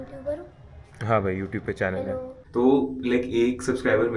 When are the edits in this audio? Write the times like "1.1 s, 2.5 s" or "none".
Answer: 2.3 s

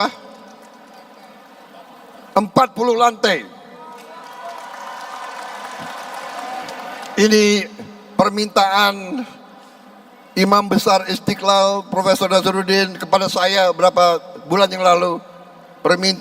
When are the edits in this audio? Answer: 6.6 s

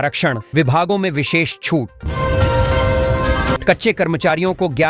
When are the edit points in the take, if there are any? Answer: 2.0 s, 3.6 s

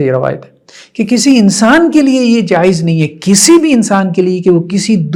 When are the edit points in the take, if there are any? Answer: none

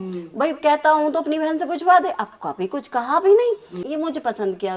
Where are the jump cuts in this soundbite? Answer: 3.7 s

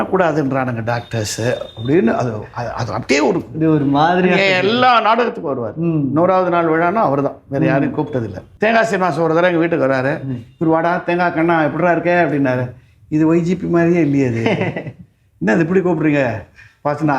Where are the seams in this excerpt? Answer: 8.5 s

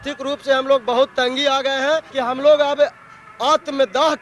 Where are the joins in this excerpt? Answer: 2.1 s

